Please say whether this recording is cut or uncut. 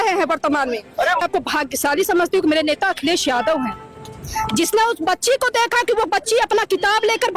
cut